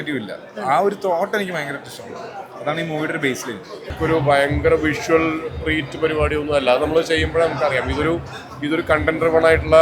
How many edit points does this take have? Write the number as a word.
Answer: one